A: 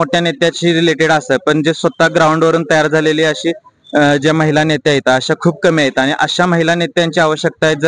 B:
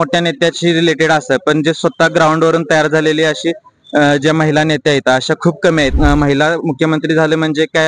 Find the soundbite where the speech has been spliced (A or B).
B